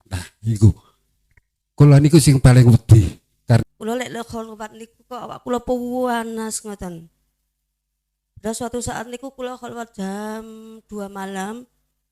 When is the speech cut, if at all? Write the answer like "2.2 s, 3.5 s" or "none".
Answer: 3.6 s